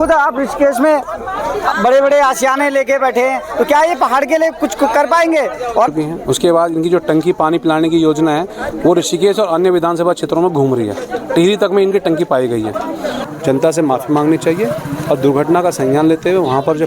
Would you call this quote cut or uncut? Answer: cut